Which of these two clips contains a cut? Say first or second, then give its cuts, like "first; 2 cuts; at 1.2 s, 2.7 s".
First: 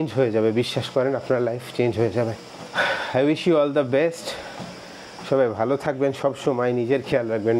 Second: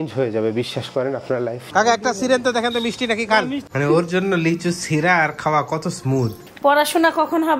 second; 3 cuts; at 1.6 s, 3.6 s, 6.4 s